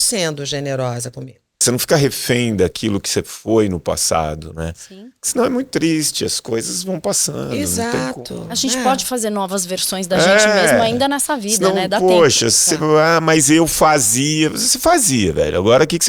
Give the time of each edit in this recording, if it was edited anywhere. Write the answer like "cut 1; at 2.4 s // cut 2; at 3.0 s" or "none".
cut 1; at 1.6 s